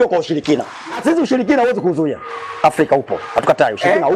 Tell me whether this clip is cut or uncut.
cut